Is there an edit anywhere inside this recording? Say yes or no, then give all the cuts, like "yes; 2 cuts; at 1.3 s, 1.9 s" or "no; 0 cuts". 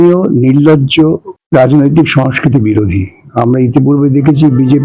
yes; 1 cut; at 1.3 s